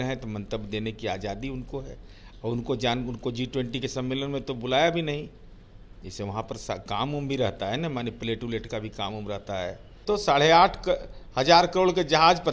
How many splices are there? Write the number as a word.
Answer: one